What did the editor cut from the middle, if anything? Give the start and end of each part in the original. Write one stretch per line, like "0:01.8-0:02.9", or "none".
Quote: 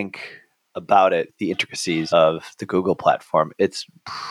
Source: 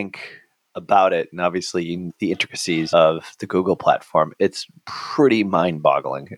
0:01.3-0:02.1